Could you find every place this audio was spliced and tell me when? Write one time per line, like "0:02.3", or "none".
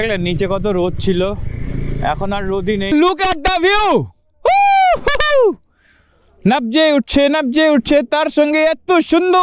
0:02.9